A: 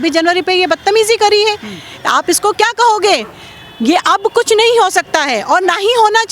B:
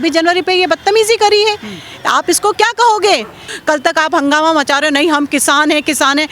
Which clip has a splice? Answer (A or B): B